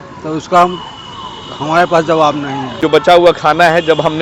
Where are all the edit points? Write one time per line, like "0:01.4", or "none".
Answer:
0:02.8